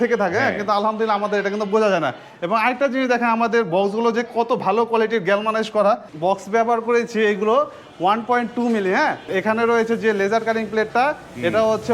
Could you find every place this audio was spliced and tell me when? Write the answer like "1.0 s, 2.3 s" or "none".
6.1 s, 9.3 s